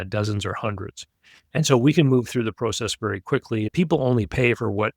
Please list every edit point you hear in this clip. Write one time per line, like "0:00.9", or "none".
0:03.7